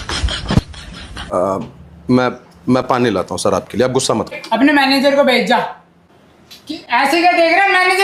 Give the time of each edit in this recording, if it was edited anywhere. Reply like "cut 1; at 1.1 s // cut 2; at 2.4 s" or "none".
cut 1; at 4.3 s